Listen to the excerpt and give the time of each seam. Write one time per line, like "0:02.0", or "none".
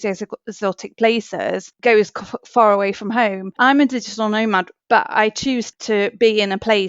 0:01.7
0:03.5
0:04.7
0:05.7

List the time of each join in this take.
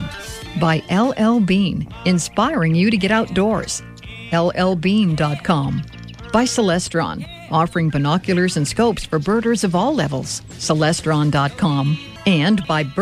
0:12.1

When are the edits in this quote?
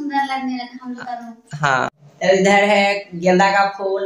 0:01.9

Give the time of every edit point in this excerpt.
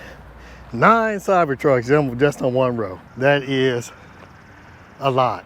0:03.0

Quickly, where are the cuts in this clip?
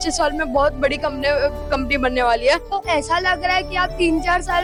none

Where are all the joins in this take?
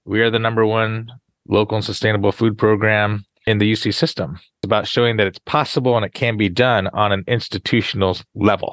0:01.2
0:03.4
0:04.6

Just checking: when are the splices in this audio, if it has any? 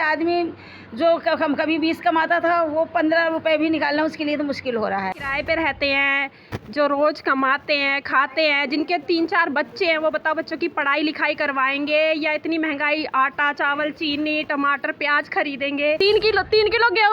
0:05.2
0:16.0

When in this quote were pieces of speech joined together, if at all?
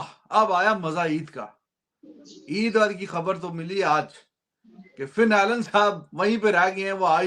none

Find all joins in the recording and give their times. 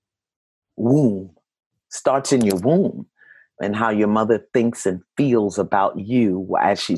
none

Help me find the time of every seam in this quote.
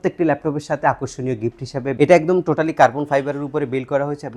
0:02.0

